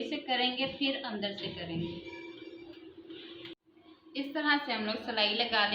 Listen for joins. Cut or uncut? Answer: cut